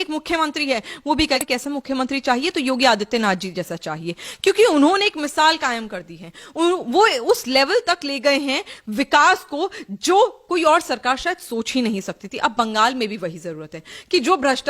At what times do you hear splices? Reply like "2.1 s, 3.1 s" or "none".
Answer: 1.4 s